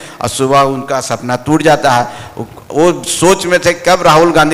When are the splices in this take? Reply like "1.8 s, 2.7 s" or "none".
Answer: none